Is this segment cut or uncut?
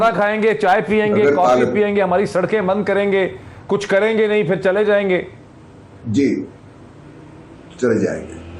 uncut